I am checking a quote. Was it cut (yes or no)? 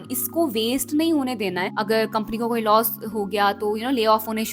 yes